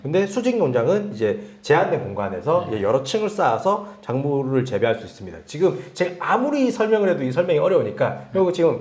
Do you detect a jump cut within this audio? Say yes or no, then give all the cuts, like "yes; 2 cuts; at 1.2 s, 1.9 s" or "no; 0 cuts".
no; 0 cuts